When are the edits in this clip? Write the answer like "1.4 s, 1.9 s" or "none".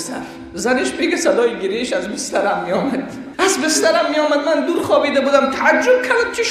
none

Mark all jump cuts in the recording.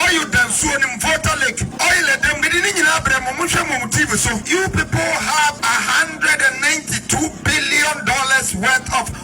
1.7 s, 2.4 s, 4.4 s, 5.6 s

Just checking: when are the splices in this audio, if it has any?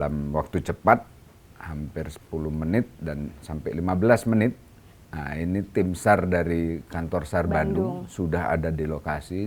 none

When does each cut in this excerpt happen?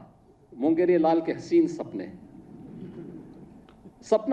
none

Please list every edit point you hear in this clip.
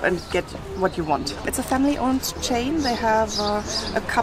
none

